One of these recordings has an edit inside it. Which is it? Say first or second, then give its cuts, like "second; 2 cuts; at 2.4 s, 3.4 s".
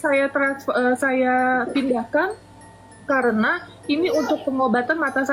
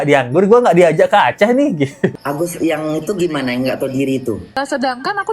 second; 2 cuts; at 2.2 s, 4.5 s